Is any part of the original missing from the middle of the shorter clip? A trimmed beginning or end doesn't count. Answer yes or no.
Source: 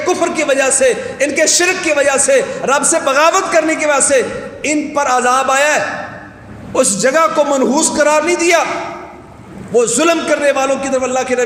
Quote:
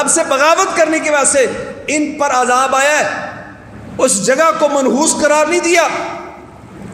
no